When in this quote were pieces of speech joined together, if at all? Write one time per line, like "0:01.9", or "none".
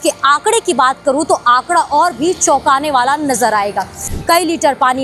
0:04.0